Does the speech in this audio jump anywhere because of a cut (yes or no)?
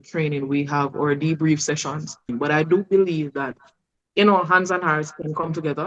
yes